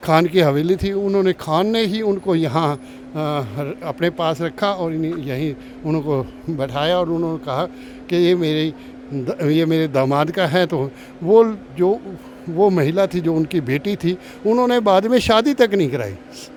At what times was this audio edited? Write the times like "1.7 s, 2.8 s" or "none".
none